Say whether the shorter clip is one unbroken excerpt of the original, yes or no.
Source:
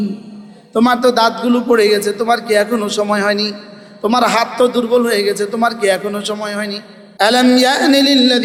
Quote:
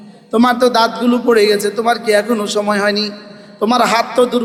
yes